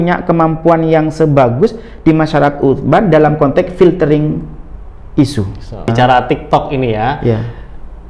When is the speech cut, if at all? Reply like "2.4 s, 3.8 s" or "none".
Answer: 5.9 s